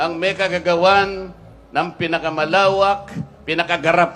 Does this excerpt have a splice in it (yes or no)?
no